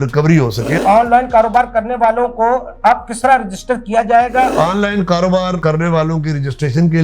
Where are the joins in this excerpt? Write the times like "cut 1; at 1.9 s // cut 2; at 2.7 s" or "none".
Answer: cut 1; at 0.8 s // cut 2; at 4.5 s